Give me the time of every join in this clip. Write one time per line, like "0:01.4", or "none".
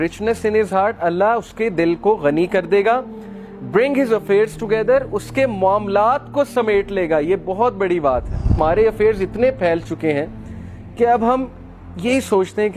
0:08.5

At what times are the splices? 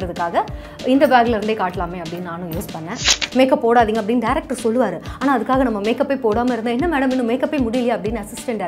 0:03.1

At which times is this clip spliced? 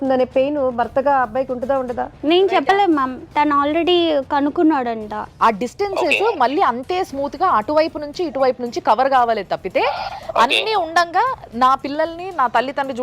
0:02.1
0:05.2

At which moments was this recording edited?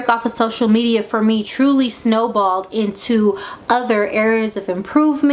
none

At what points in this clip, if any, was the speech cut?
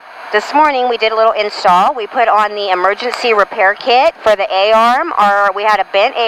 none

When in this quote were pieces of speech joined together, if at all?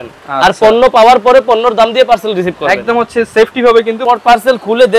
0:04.0

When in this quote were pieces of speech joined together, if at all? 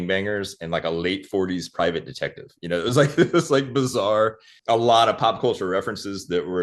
0:04.5

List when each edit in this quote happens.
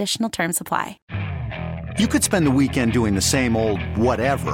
0:01.0

